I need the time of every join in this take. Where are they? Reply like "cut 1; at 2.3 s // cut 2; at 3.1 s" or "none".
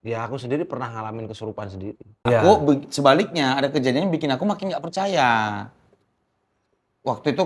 cut 1; at 2.1 s